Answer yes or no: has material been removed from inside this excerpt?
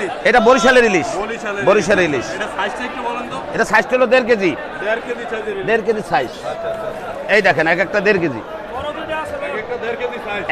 no